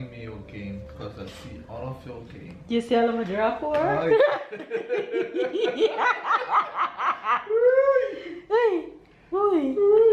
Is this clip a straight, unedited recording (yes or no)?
yes